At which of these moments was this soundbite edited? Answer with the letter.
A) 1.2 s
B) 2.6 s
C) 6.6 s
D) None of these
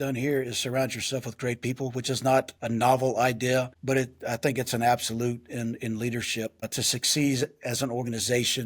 B